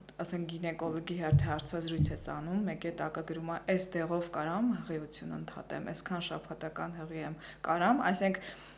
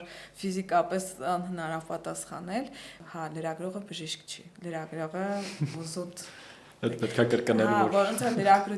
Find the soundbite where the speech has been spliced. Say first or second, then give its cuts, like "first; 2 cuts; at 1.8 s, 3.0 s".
second; 1 cut; at 2.9 s